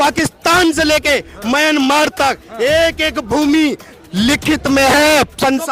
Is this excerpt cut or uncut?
uncut